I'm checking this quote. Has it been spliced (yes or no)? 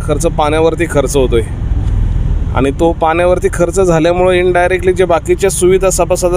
no